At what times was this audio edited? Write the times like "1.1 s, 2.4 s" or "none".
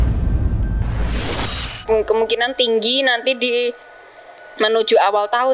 1.7 s